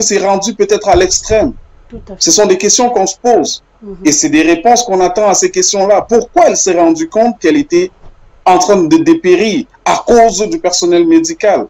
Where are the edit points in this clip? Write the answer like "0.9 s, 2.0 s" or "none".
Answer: none